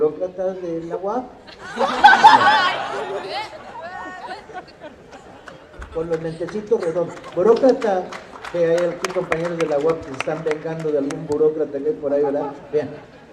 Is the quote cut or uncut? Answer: uncut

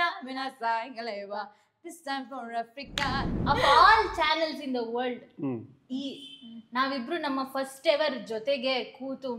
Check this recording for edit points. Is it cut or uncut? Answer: cut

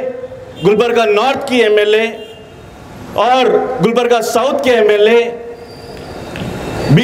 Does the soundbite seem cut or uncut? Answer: uncut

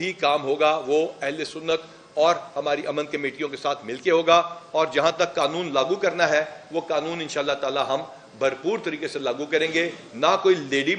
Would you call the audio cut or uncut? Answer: uncut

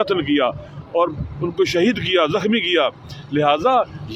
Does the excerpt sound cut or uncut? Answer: uncut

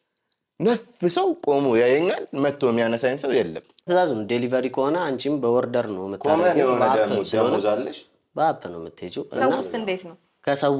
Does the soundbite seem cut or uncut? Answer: cut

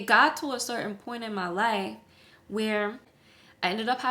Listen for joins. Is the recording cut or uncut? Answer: uncut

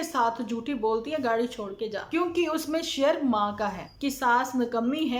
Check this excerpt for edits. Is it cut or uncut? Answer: cut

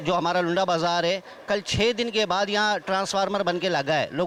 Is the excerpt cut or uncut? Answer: uncut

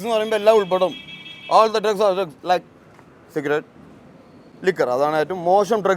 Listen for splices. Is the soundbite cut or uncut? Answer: uncut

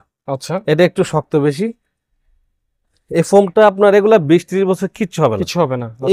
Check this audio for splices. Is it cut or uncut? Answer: uncut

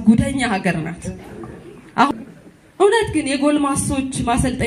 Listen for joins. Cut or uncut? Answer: cut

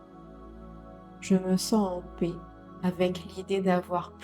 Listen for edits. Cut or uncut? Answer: cut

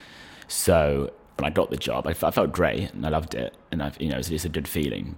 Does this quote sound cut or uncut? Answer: cut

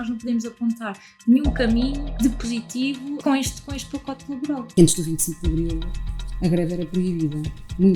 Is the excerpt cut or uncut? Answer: cut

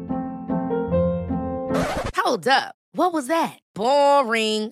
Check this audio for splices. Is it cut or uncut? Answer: uncut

